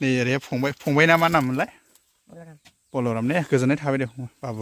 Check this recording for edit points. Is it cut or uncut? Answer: uncut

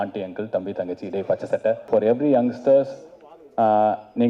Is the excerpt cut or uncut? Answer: cut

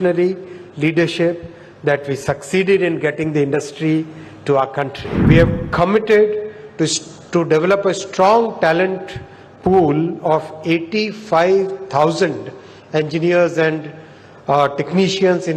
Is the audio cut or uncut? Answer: cut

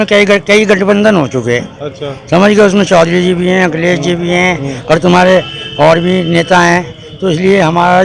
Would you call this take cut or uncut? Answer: uncut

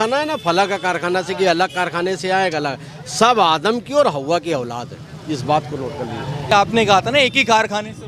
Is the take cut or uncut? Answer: cut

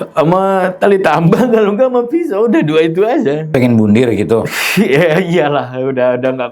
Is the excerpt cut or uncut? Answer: cut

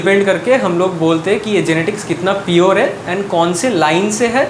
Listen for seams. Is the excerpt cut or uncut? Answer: uncut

